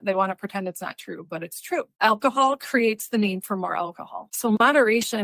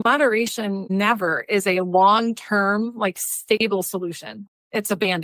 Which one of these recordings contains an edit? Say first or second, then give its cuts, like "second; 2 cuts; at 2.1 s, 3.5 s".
second; 1 cut; at 4.3 s